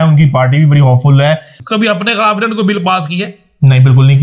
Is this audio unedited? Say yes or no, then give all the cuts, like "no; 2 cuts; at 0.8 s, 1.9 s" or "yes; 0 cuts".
no; 1 cut; at 1.5 s